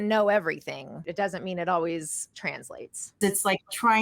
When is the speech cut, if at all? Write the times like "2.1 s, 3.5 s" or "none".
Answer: 1.0 s, 3.2 s